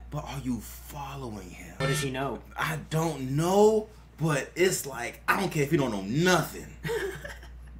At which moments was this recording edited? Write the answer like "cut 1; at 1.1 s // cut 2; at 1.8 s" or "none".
cut 1; at 1.8 s